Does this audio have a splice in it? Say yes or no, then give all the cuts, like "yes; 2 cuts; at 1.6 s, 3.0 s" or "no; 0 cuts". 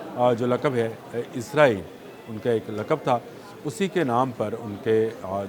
no; 0 cuts